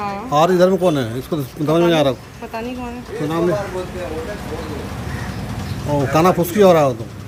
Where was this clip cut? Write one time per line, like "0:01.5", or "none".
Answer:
none